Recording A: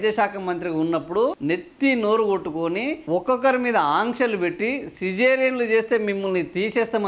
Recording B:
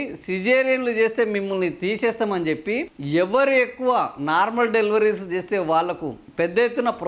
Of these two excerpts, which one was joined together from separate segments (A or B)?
A